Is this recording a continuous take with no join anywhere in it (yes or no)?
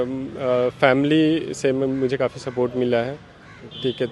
yes